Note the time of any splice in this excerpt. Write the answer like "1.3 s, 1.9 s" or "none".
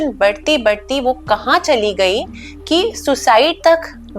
none

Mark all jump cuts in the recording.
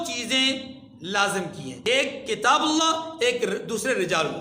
1.8 s

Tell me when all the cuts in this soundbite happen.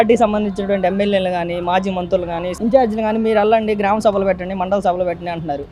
2.5 s

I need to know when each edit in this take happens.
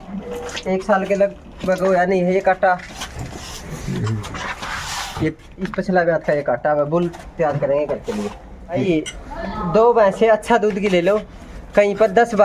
8.8 s

